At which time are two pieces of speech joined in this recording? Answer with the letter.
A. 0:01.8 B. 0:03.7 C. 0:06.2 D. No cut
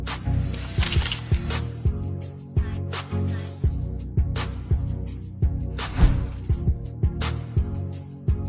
D